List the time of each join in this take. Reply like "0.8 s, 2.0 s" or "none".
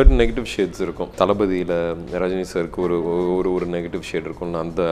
1.1 s